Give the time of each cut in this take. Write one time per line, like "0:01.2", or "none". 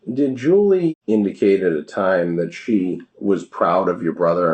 0:01.0
0:03.1